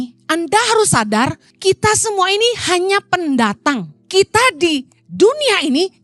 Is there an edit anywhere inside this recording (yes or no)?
yes